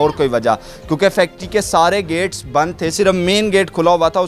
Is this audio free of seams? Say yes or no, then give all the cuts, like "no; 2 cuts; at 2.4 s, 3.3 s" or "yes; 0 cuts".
yes; 0 cuts